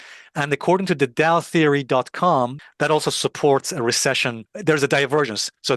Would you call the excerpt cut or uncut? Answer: cut